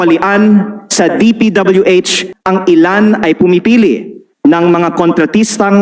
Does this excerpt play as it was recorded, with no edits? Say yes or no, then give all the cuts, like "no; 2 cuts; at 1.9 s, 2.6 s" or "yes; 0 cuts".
no; 1 cut; at 2.3 s